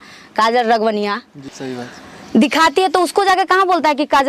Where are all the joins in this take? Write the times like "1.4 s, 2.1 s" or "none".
1.5 s

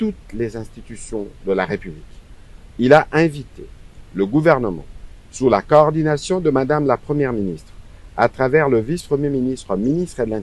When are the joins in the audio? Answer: none

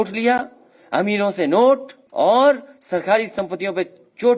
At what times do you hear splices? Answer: 2.0 s

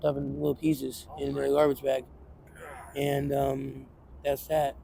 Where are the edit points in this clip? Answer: none

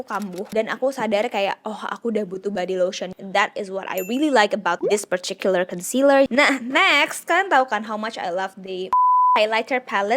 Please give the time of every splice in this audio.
3.1 s, 6.3 s

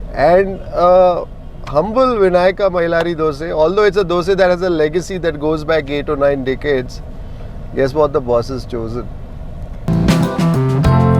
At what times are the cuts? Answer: 9.9 s

